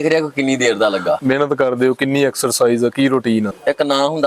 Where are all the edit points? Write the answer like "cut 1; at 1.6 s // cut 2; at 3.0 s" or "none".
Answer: cut 1; at 1.2 s // cut 2; at 3.5 s